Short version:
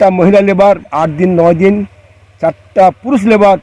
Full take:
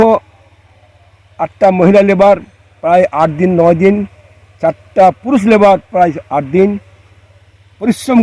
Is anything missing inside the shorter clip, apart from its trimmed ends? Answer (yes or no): yes